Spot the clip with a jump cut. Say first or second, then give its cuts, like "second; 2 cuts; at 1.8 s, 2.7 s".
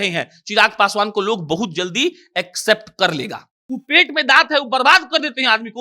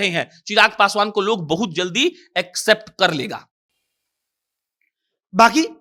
first; 1 cut; at 3.5 s